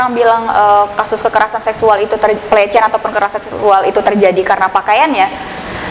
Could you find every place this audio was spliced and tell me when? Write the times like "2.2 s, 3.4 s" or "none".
none